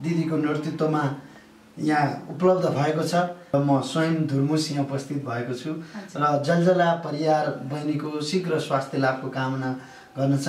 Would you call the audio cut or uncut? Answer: cut